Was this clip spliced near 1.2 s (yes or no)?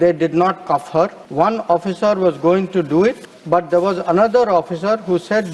yes